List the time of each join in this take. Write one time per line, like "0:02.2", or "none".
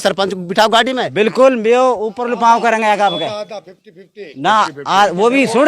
0:01.0